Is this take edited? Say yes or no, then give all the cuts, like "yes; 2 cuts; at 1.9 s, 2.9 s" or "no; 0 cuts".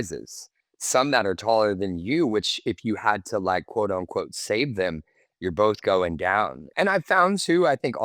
yes; 1 cut; at 6.6 s